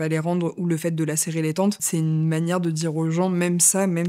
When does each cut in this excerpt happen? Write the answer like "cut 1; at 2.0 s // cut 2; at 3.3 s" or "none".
cut 1; at 1.8 s